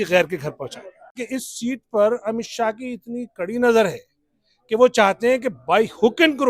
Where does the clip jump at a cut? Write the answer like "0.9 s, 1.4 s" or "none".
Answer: 1.2 s